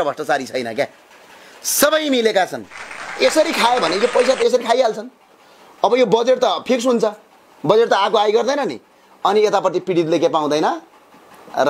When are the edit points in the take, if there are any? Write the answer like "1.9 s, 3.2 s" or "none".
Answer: 3.1 s